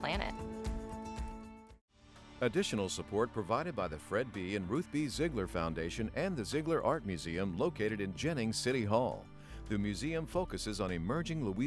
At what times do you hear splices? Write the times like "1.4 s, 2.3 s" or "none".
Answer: 2.2 s